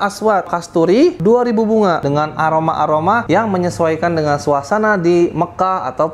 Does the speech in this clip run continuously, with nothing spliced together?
no; 3 cuts; at 1.1 s, 2.0 s, 3.2 s

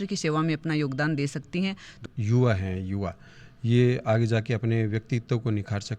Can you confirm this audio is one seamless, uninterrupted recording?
no; 1 cut; at 1.9 s

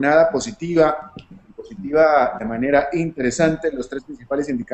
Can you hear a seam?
no; 0 cuts

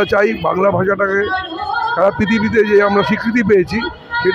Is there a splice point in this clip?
no; 0 cuts

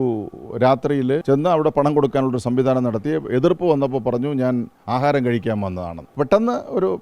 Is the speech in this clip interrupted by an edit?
yes; 2 cuts; at 1.2 s, 6.1 s

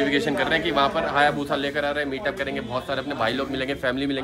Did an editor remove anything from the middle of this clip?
no; 0 cuts

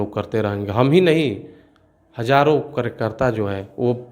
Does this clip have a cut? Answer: no; 0 cuts

